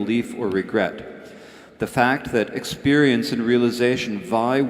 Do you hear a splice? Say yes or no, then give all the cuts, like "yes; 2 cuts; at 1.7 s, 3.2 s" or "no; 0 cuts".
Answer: yes; 1 cut; at 1.8 s